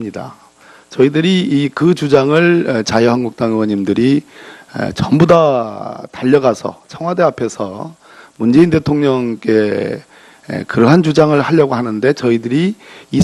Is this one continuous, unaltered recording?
no; 1 cut; at 9.4 s

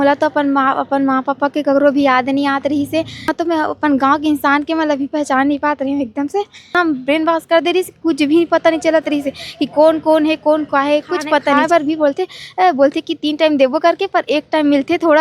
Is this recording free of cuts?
no; 3 cuts; at 3.3 s, 6.7 s, 11.6 s

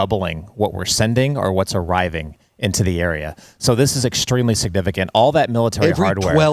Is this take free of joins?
yes; 0 cuts

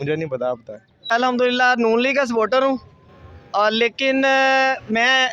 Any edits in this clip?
yes; 1 cut; at 1.1 s

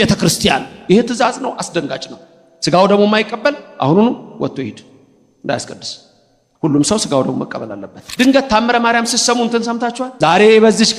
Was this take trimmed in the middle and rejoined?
yes; 2 cuts; at 8.0 s, 10.1 s

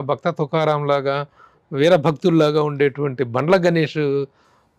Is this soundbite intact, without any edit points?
yes; 0 cuts

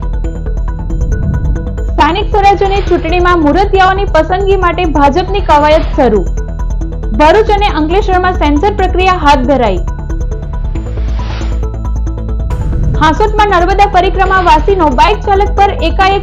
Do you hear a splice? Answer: no; 0 cuts

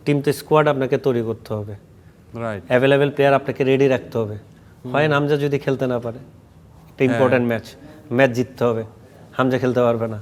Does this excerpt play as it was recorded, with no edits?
yes; 0 cuts

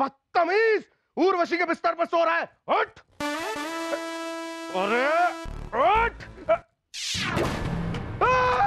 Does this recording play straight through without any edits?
yes; 0 cuts

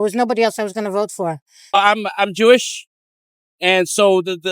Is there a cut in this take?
yes; 1 cut; at 1.5 s

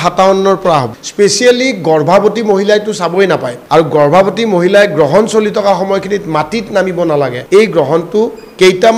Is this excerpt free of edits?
no; 3 cuts; at 1.0 s, 3.5 s, 7.4 s

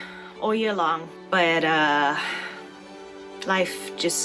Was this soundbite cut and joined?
yes; 1 cut; at 1.1 s

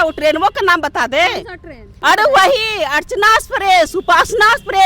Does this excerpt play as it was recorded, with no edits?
no; 1 cut; at 1.9 s

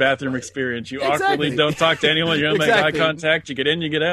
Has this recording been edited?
no; 0 cuts

